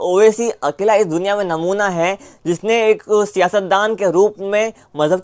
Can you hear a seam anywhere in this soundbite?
no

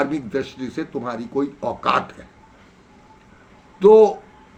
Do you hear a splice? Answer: no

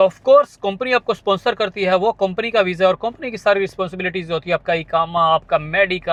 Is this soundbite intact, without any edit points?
yes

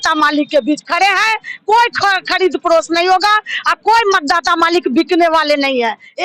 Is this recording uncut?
yes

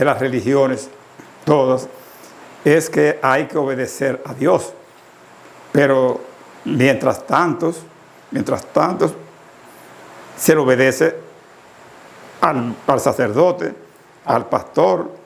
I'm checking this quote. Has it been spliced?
no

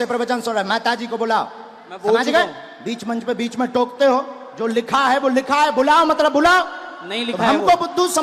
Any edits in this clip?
no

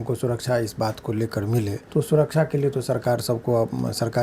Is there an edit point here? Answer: yes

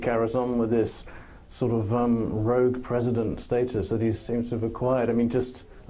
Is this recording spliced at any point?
no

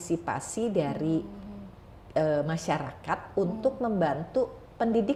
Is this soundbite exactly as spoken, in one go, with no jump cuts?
yes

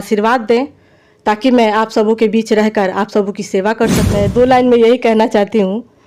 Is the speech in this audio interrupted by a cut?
yes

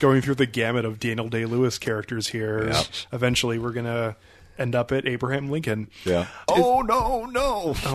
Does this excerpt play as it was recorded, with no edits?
no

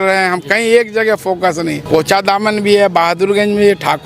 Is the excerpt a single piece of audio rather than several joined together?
no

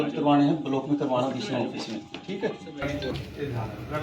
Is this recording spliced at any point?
yes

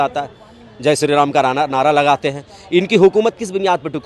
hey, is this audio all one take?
yes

